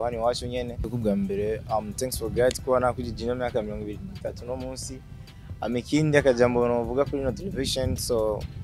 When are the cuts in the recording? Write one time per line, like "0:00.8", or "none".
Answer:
0:00.9